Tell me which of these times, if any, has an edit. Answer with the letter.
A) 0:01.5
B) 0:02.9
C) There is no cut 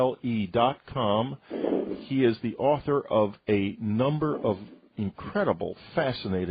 C